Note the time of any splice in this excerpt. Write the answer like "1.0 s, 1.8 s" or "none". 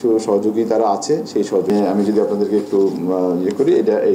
1.7 s